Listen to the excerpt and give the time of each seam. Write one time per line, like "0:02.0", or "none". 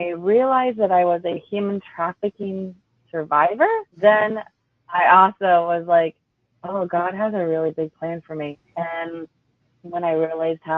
0:03.9
0:08.5